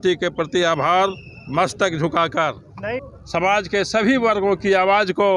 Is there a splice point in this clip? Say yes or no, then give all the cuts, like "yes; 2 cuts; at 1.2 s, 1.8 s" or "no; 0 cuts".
yes; 1 cut; at 3.1 s